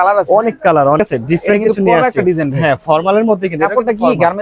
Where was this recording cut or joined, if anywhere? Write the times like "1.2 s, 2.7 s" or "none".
1.0 s